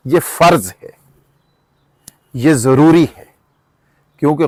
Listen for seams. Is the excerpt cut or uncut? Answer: uncut